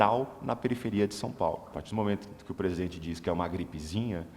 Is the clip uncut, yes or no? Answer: no